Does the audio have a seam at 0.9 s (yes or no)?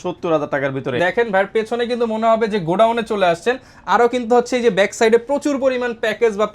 yes